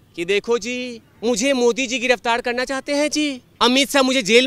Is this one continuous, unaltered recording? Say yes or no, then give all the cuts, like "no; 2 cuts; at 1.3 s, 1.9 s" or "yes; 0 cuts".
no; 2 cuts; at 1.0 s, 3.4 s